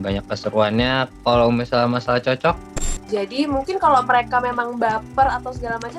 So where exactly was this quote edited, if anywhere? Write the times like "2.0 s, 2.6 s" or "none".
3.0 s